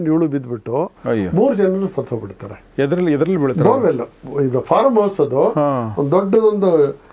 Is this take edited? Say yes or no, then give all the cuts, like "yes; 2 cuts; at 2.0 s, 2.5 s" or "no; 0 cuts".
no; 0 cuts